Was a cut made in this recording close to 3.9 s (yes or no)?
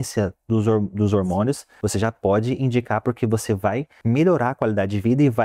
yes